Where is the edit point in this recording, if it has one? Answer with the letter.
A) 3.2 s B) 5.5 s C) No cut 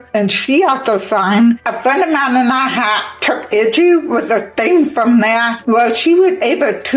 B